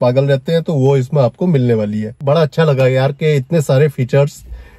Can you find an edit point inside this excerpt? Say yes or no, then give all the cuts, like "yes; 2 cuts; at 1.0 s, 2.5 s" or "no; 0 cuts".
yes; 1 cut; at 2.2 s